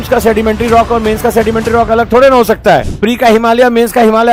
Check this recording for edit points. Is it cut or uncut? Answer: uncut